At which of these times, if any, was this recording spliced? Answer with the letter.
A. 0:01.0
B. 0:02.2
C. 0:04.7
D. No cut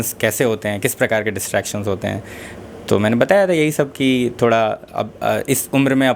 D